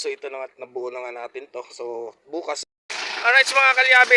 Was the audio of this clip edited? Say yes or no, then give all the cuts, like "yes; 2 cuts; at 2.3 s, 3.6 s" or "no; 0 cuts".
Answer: yes; 1 cut; at 2.6 s